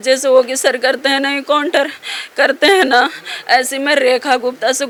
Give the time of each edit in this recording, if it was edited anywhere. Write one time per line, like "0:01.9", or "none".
none